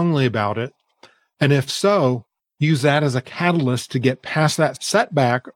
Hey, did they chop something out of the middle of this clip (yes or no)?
no